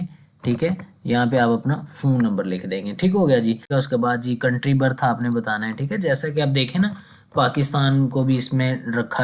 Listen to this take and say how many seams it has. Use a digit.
1